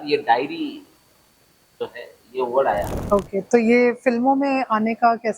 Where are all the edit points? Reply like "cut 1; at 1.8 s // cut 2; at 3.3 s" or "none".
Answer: cut 1; at 2.9 s